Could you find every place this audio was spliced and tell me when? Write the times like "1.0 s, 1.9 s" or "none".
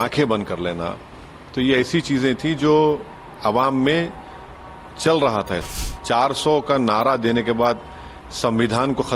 5.7 s